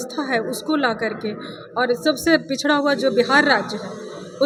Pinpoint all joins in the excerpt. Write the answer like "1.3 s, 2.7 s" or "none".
none

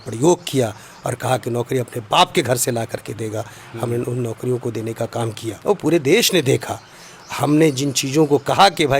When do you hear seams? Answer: 5.5 s

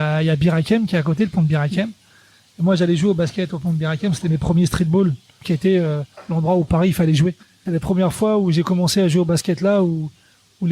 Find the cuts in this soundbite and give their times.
5.4 s, 7.5 s

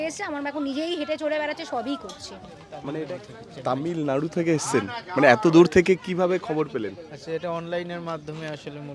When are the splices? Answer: 3.1 s

